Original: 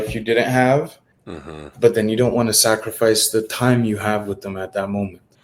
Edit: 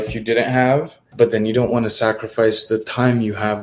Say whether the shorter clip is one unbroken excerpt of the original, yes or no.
no